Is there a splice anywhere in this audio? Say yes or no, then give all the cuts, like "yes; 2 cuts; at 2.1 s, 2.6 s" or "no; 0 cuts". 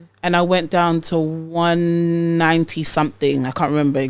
no; 0 cuts